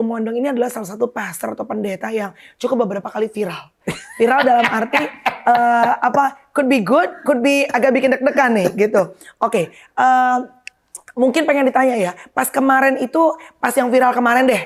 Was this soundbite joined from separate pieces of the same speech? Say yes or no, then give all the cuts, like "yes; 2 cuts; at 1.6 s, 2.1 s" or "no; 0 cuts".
no; 0 cuts